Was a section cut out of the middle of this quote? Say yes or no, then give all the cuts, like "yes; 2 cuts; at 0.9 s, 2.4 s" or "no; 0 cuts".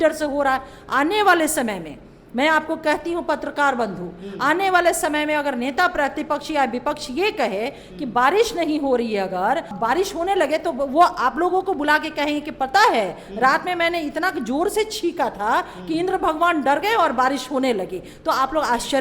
yes; 1 cut; at 9.7 s